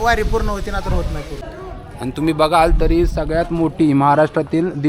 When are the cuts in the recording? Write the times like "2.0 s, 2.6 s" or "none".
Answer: 1.4 s